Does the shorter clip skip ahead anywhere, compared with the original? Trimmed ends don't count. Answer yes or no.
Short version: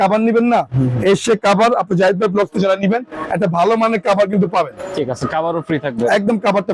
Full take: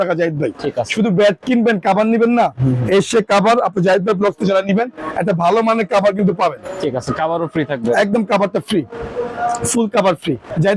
no